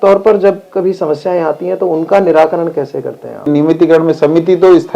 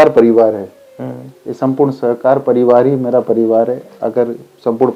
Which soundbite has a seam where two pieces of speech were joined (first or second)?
first